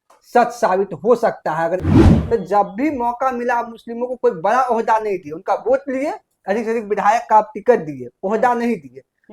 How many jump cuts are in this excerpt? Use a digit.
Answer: 1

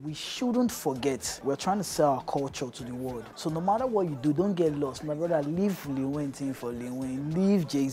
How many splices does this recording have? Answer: 2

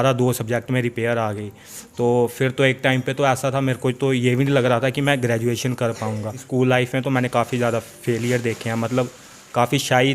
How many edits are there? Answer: 1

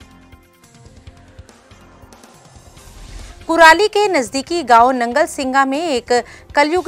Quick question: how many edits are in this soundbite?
1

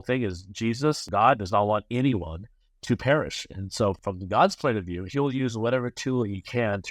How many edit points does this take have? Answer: 2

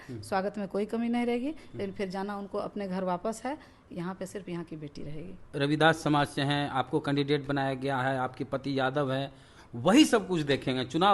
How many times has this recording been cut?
1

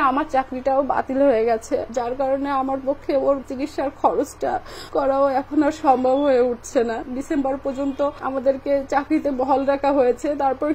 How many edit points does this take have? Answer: 2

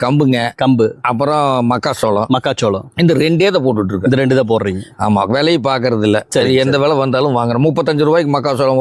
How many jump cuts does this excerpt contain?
0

